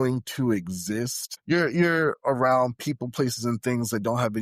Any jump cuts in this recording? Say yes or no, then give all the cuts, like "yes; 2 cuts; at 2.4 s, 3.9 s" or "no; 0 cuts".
yes; 1 cut; at 1.3 s